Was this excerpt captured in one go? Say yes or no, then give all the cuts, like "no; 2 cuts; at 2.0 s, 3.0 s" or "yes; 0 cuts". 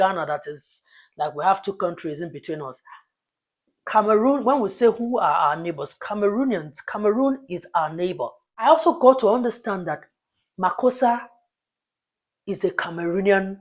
no; 1 cut; at 8.7 s